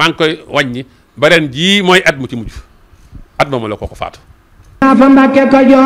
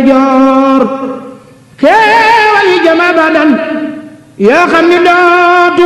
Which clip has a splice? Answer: first; 1 cut; at 4.6 s

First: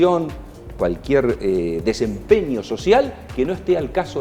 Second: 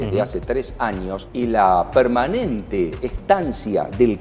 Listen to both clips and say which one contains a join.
second; 2 cuts; at 1.2 s, 3.1 s

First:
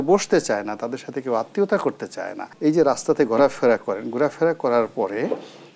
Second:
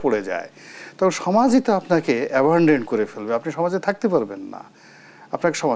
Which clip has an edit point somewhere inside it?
first; 1 cut; at 2.4 s

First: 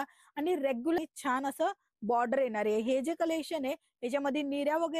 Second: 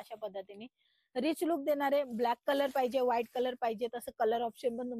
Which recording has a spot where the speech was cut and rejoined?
first; 1 cut; at 1.0 s

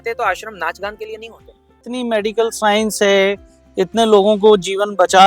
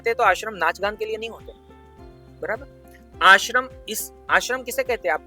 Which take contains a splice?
first; 1 cut; at 1.8 s

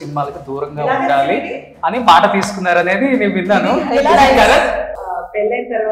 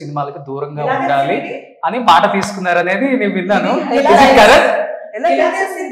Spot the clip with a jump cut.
first; 1 cut; at 5.0 s

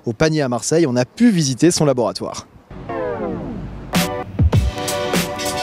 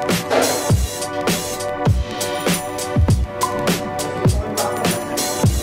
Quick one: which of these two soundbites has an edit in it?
first; 1 cut; at 3.2 s

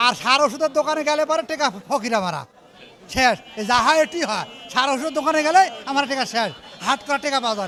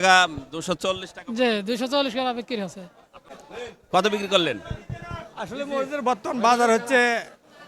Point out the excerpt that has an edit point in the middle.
second; 1 cut; at 3.3 s

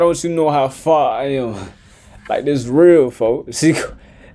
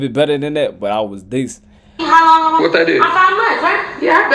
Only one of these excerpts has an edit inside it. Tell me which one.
second; 1 cut; at 2.0 s

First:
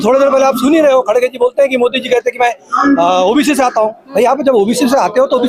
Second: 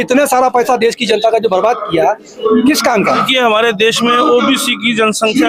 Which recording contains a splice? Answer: second; 1 cut; at 3.3 s

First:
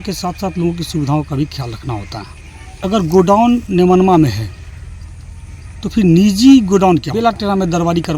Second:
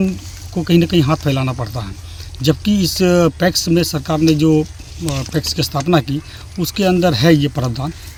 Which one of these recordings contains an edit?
first; 2 cuts; at 2.9 s, 6.7 s

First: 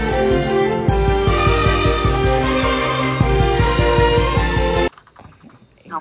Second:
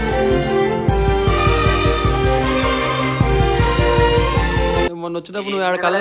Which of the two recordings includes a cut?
second; 1 cut; at 5.0 s

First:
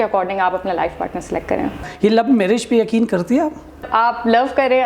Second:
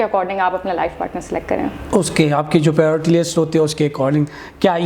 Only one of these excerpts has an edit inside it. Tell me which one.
first; 2 cuts; at 1.8 s, 3.8 s

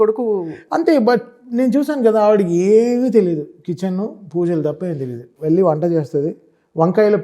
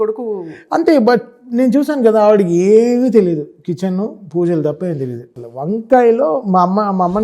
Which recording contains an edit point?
second; 1 cut; at 5.3 s

